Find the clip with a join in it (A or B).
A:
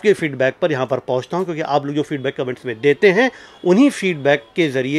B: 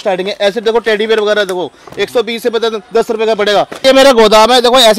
B